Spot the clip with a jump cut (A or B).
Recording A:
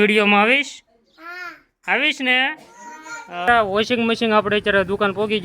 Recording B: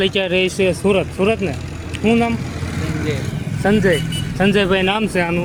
A